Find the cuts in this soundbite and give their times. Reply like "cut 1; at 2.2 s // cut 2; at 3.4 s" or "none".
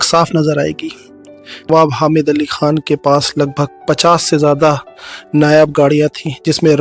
cut 1; at 1.7 s